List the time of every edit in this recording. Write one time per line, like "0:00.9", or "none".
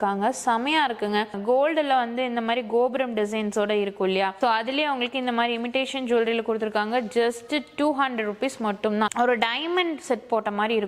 0:01.3
0:04.3
0:09.1